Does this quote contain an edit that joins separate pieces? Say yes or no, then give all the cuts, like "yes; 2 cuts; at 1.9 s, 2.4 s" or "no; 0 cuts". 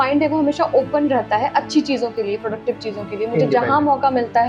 no; 0 cuts